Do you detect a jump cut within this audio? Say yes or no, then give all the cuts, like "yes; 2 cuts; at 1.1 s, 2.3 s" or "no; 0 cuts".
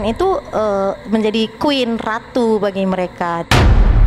no; 0 cuts